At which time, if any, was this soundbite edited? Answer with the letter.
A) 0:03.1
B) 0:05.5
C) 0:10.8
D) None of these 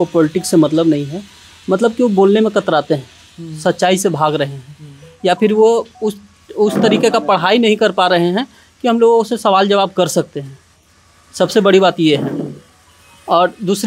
D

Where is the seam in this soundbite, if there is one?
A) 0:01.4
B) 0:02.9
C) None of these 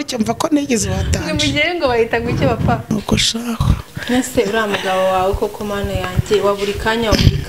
B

